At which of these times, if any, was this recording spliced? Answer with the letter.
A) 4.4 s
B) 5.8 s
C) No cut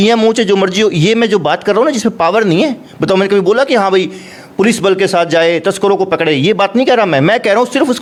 C